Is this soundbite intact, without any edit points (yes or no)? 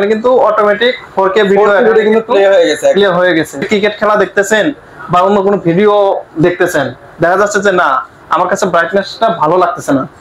no